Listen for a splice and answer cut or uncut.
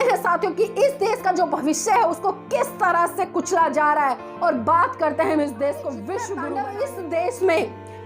cut